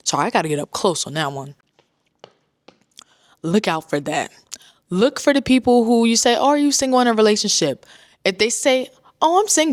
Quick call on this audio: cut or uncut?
uncut